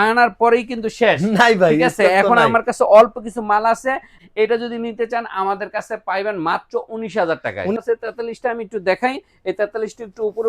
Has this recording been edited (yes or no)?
yes